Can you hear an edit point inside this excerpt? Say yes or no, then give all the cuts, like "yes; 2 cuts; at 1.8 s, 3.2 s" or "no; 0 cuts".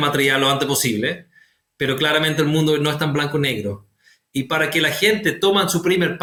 no; 0 cuts